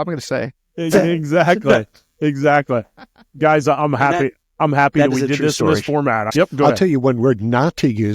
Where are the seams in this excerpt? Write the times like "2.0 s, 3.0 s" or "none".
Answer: 6.3 s